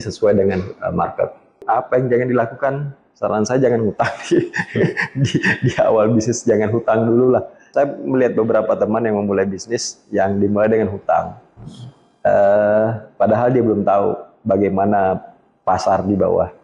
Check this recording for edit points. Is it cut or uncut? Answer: cut